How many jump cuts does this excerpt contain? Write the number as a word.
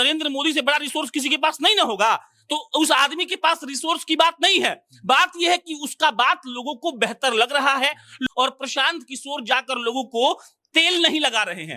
one